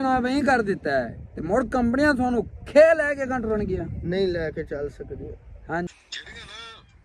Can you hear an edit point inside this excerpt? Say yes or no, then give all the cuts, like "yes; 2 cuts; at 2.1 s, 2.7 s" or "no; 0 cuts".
yes; 1 cut; at 5.9 s